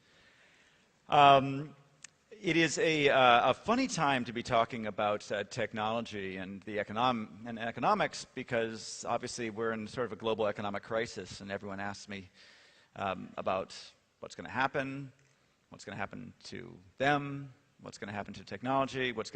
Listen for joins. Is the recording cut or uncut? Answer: cut